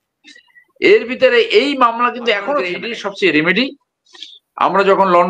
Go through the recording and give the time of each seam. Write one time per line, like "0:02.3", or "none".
0:02.9